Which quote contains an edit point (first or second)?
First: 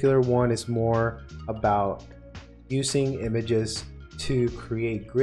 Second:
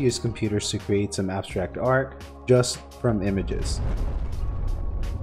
second